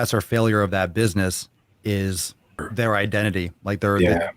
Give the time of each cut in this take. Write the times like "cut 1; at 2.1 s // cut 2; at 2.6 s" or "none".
cut 1; at 2.7 s

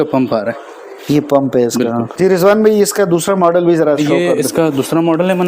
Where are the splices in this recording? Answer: cut 1; at 2.1 s

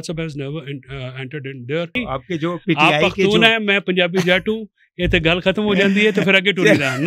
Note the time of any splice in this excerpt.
cut 1; at 2.0 s

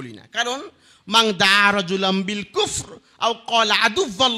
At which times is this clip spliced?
none

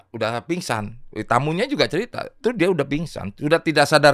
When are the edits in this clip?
cut 1; at 2.3 s

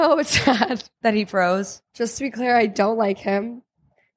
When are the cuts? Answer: cut 1; at 0.9 s // cut 2; at 1.8 s

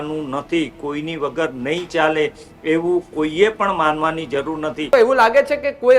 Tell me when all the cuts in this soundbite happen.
cut 1; at 4.9 s

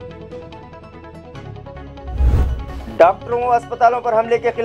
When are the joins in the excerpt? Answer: cut 1; at 2.6 s

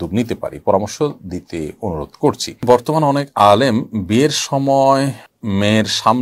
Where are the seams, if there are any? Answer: cut 1; at 2.5 s // cut 2; at 5.3 s

